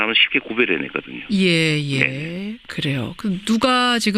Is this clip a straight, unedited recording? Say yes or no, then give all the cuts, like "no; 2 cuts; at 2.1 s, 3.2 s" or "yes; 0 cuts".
no; 1 cut; at 1.0 s